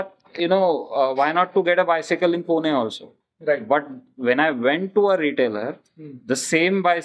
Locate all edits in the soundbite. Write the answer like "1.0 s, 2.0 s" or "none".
none